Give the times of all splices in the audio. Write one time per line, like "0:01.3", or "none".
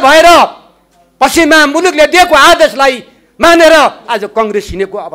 none